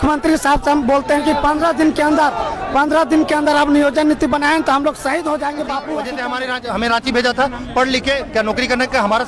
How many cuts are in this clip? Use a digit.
1